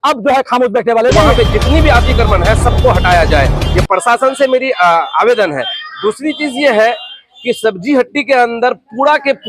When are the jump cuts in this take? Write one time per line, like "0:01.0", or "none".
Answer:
0:01.3